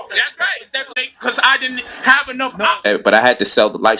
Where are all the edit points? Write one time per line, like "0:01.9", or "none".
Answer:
0:02.9

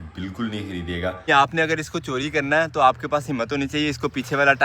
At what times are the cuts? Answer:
0:01.3

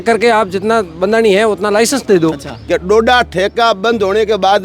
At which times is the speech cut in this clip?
0:02.5

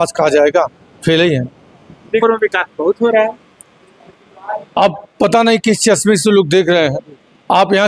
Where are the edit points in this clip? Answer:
0:02.2

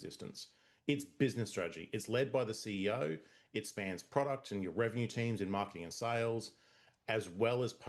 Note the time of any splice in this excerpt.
none

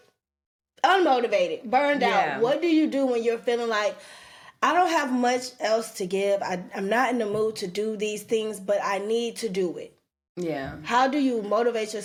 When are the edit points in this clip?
none

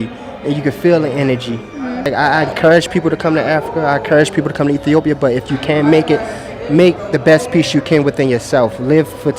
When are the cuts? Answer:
0:02.1

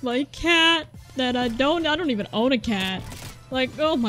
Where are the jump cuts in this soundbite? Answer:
none

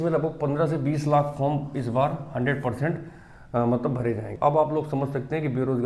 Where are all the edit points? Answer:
0:04.3

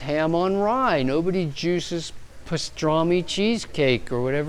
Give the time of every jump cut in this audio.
0:02.3

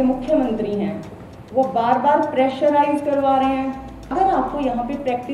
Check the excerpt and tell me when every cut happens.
0:04.1

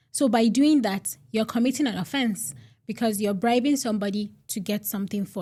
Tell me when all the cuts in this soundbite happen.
none

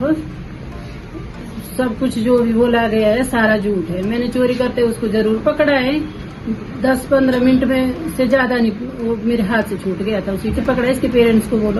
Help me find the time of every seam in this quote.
0:10.6

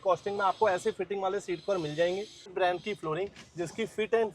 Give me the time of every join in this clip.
0:02.5

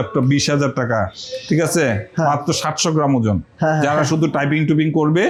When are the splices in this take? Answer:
none

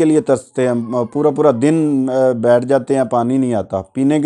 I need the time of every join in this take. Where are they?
none

